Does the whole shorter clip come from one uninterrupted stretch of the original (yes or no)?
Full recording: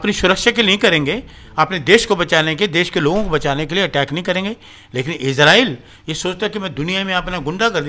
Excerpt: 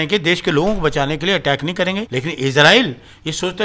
no